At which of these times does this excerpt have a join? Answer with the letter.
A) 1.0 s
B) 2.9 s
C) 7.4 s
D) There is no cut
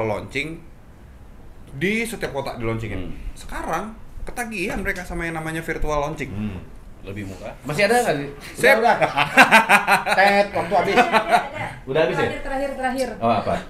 C